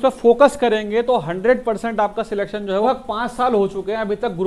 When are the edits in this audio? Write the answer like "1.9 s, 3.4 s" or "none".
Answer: 2.8 s